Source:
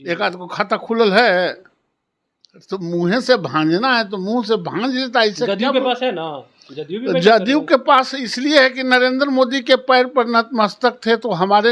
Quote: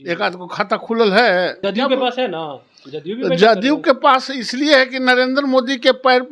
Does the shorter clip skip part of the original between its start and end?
yes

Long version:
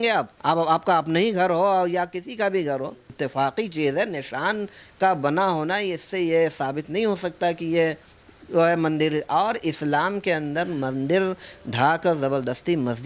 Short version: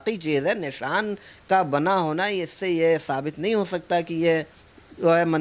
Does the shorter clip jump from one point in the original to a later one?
no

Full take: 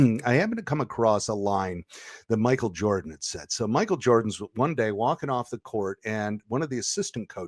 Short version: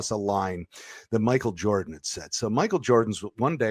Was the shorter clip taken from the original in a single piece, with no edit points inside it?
yes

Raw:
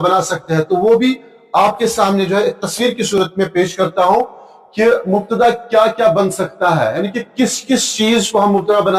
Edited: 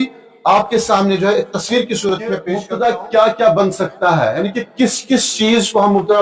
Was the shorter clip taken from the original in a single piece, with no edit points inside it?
no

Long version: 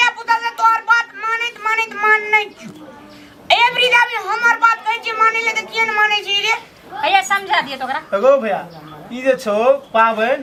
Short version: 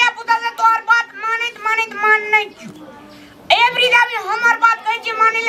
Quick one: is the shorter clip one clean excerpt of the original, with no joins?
yes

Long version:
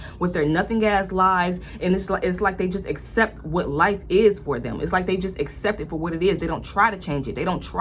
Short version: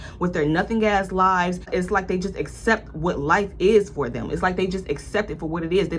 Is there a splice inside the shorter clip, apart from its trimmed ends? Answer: yes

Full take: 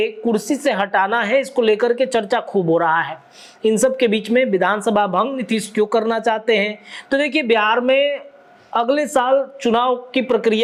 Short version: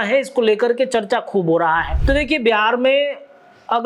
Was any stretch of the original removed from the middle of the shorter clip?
yes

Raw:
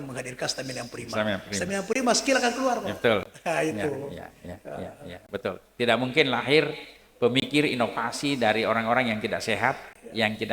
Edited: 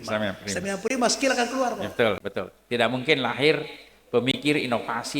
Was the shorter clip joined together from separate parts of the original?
yes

